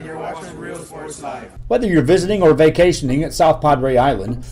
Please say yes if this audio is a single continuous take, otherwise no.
no